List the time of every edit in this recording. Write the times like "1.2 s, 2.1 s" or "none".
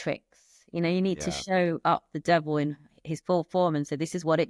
none